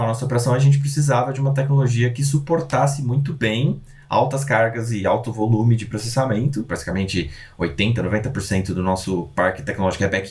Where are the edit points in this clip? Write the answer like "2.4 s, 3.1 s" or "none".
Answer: 6.7 s